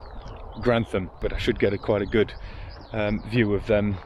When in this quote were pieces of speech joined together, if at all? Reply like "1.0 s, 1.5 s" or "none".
1.2 s